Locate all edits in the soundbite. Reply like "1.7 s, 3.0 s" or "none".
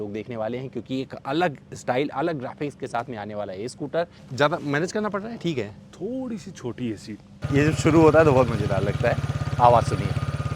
4.2 s, 7.4 s